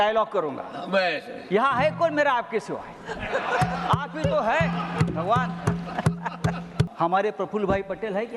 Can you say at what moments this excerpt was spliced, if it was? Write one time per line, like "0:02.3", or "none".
0:06.9